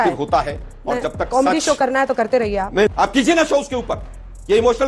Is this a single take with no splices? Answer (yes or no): no